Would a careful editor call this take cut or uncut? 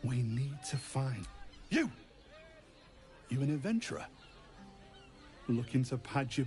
cut